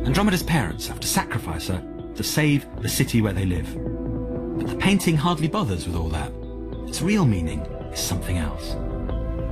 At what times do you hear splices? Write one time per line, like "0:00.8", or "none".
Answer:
0:02.9